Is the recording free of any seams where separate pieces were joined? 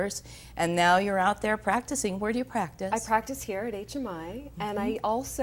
yes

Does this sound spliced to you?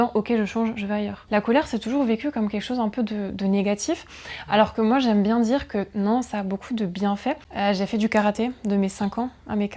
yes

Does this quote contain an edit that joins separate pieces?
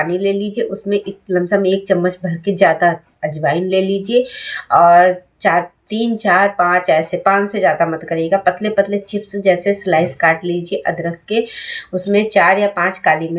no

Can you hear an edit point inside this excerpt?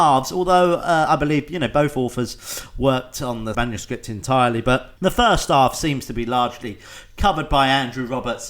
yes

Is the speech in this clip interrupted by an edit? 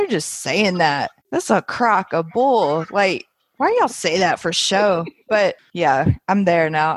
yes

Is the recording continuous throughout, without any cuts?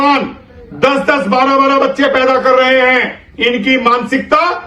yes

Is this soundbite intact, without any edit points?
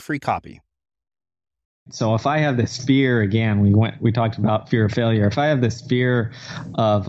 no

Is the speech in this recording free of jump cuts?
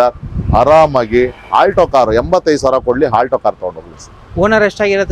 yes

